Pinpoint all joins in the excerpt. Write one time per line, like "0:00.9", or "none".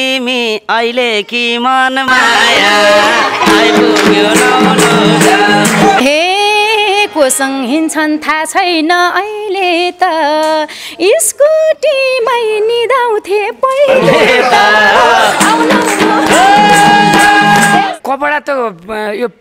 0:06.0
0:17.9